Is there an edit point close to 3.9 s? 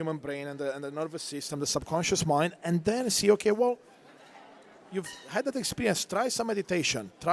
no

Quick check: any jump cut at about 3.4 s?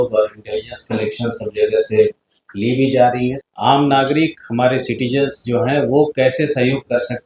yes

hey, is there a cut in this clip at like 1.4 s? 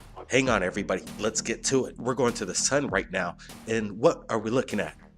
no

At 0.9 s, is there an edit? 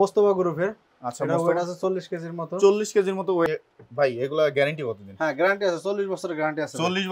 no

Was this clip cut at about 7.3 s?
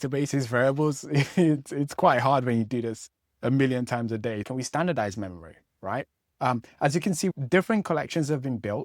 yes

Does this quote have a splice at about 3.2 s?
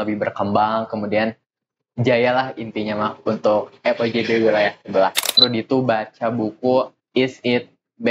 no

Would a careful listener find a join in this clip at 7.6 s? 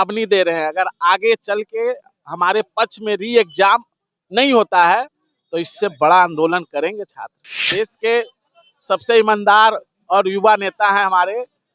yes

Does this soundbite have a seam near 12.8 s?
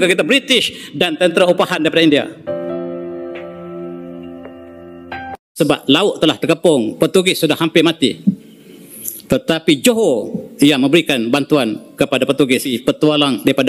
yes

